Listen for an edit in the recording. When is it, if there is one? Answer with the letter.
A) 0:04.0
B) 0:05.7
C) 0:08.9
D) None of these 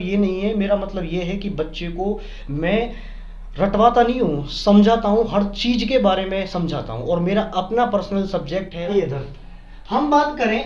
C